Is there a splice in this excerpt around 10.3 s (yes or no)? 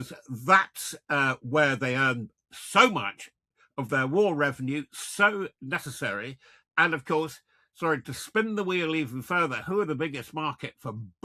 no